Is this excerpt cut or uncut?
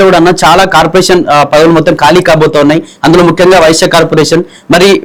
uncut